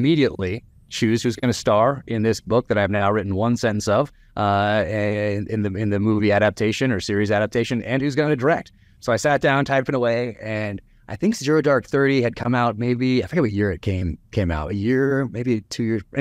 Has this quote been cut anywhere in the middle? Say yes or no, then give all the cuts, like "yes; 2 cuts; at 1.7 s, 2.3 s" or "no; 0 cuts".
no; 0 cuts